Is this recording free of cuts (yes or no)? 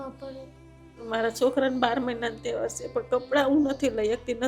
no